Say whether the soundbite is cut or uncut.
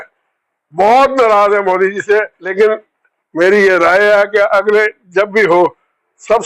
cut